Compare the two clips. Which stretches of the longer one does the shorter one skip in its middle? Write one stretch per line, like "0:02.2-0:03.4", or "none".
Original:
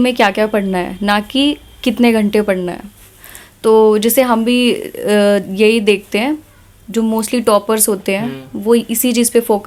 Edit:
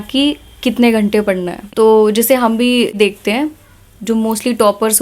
0:02.8-0:03.5
0:04.8-0:05.8